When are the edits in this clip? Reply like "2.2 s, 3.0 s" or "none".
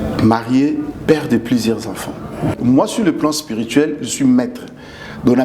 2.5 s